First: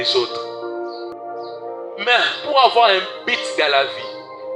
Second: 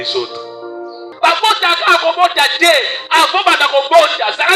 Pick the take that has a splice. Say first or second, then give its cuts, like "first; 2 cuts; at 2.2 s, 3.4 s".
second; 1 cut; at 1.0 s